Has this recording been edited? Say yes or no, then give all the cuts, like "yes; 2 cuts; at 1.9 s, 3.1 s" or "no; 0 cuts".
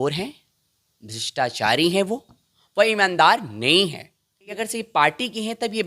yes; 1 cut; at 4.5 s